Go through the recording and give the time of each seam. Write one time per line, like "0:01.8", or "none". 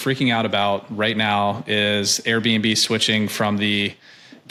none